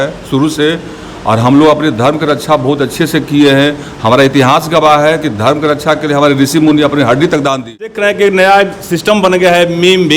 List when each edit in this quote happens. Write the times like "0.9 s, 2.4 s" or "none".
8.0 s